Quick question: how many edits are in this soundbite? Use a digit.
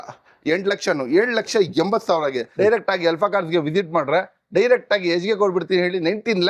1